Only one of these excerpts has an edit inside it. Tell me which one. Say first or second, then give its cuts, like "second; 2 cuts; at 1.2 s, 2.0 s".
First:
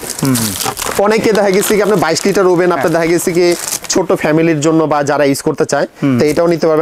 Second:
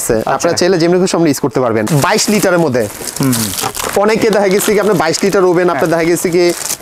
second; 1 cut; at 1.9 s